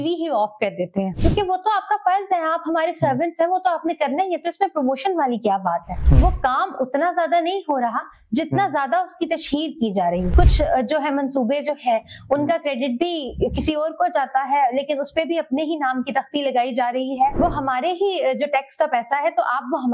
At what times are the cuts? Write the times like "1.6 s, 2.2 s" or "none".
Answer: 1.1 s, 5.9 s, 10.3 s, 17.3 s